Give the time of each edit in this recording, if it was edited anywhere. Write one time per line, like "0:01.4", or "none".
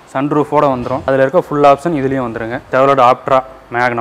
0:01.0
0:02.7